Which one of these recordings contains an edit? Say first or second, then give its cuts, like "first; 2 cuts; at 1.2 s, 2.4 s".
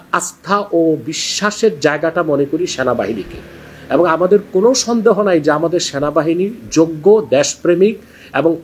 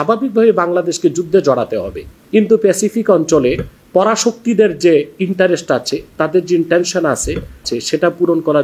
second; 2 cuts; at 2.1 s, 7.7 s